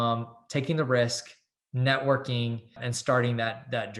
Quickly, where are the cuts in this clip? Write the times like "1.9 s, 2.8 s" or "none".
2.9 s